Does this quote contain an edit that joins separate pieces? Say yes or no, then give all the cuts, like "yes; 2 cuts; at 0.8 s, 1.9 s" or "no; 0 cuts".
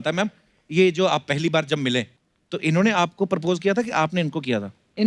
no; 0 cuts